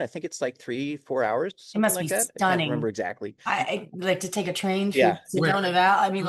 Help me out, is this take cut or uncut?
uncut